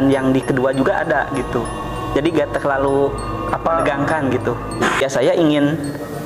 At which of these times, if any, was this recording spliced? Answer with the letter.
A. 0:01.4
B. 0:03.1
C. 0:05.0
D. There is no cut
C